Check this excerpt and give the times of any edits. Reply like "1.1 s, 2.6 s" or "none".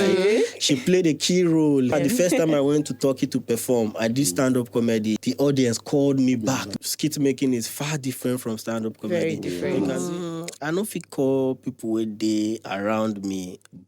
1.9 s, 5.2 s, 6.7 s, 9.8 s